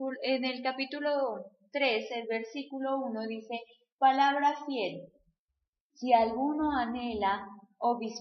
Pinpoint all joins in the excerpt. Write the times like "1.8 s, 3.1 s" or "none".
3.8 s